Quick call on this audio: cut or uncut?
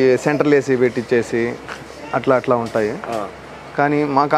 uncut